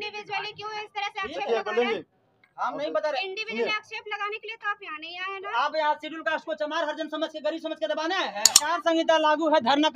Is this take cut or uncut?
cut